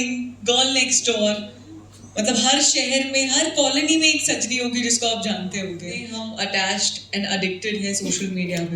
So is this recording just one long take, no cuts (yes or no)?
no